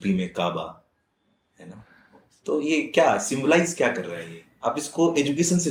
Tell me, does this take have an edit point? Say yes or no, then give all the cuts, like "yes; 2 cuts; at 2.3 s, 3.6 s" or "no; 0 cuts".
no; 0 cuts